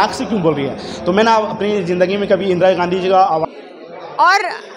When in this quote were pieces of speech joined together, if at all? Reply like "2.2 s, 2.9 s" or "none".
3.4 s